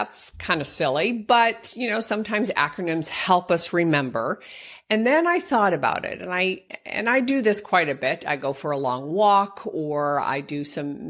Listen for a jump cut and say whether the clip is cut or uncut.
uncut